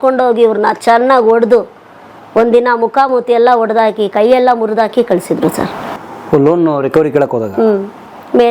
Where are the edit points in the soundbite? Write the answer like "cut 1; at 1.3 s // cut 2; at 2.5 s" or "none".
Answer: none

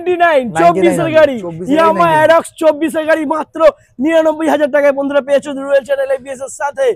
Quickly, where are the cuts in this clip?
none

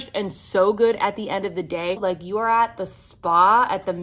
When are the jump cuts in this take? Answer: cut 1; at 2.0 s

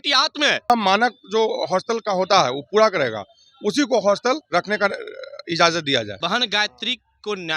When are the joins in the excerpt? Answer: cut 1; at 0.7 s // cut 2; at 4.4 s // cut 3; at 6.1 s

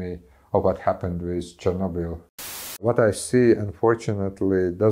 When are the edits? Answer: cut 1; at 2.8 s

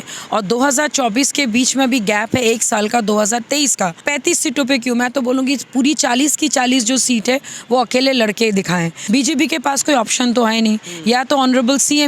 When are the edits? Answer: cut 1; at 4.0 s // cut 2; at 8.9 s

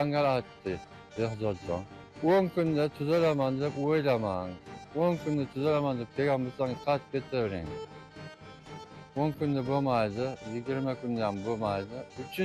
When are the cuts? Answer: cut 1; at 2.0 s

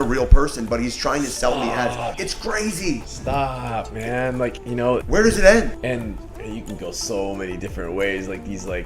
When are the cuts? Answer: cut 1; at 2.2 s // cut 2; at 3.1 s // cut 3; at 4.8 s // cut 4; at 5.9 s

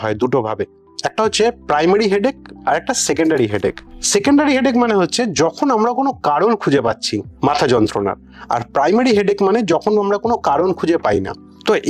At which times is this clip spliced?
none

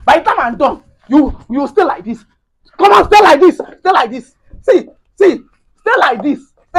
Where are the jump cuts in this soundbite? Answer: none

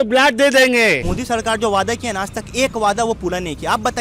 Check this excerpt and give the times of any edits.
cut 1; at 1.1 s

